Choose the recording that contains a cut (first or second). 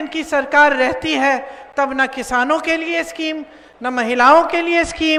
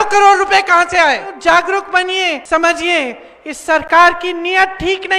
second